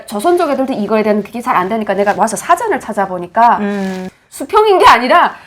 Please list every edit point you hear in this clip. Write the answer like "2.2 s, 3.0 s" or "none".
4.1 s